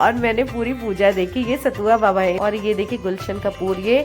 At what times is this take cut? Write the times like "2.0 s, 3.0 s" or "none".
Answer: 2.4 s